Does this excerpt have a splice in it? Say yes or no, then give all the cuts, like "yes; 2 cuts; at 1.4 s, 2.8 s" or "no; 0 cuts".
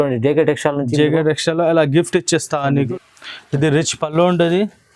yes; 1 cut; at 2.9 s